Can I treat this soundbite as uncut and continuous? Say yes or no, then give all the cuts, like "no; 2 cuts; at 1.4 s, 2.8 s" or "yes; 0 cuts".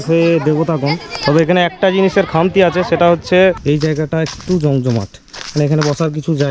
no; 1 cut; at 3.6 s